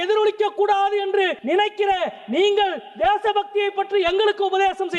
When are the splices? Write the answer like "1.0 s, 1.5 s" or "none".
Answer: 1.4 s